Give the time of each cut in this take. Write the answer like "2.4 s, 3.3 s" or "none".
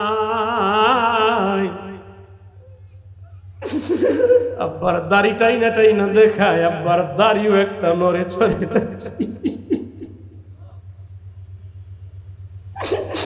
none